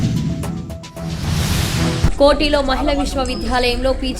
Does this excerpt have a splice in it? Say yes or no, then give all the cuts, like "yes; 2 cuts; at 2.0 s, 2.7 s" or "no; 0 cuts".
yes; 1 cut; at 2.1 s